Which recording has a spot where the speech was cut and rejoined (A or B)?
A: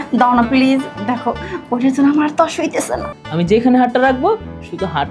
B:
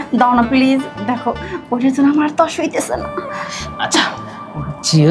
A